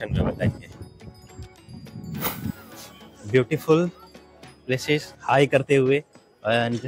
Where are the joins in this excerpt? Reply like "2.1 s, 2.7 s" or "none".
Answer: 2.6 s